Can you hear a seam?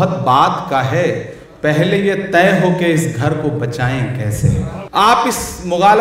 yes; 1 cut; at 4.8 s

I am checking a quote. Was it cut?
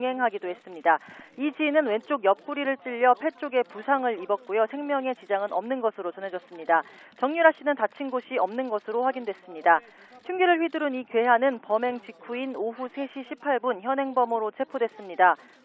yes; 1 cut; at 6.9 s

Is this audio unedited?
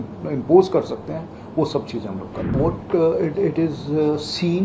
no; 1 cut; at 2.5 s

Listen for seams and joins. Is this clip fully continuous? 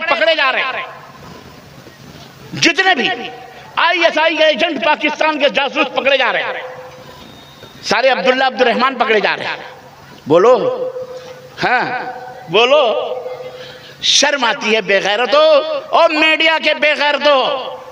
yes; 0 cuts

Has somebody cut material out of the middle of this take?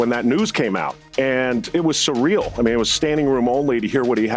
yes; 2 cuts; at 1.0 s, 1.7 s

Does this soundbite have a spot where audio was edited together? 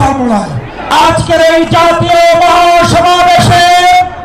yes; 1 cut; at 0.9 s

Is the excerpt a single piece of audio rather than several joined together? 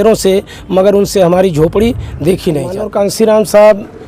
no; 1 cut; at 2.8 s

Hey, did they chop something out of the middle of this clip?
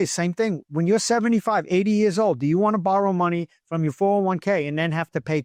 no; 0 cuts

